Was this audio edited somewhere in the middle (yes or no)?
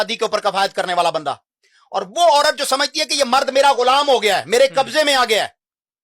no